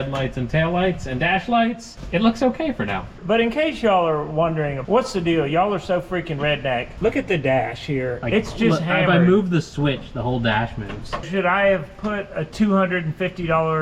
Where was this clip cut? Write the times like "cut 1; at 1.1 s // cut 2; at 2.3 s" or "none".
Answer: cut 1; at 11.3 s // cut 2; at 12.4 s